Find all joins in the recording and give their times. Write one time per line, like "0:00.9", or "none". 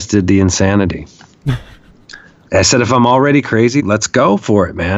0:02.5
0:03.8